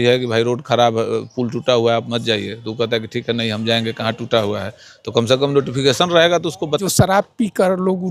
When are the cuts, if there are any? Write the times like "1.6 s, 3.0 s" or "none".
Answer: 6.8 s